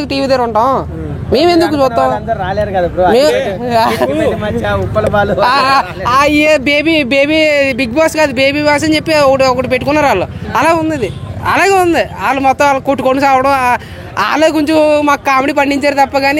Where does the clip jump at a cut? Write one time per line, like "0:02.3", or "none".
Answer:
none